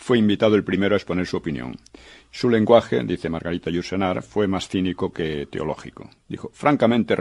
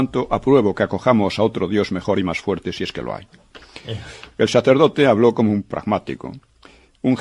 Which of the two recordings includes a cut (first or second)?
first